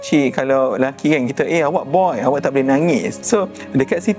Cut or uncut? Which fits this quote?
cut